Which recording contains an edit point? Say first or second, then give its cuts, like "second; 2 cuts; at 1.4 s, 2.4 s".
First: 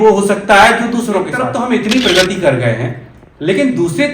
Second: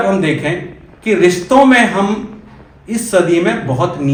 first; 1 cut; at 1.4 s